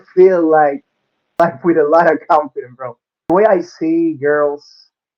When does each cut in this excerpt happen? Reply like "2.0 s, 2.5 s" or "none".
1.3 s, 3.3 s